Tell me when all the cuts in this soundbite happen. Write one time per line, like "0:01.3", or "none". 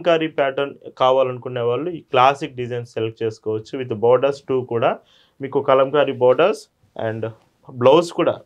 none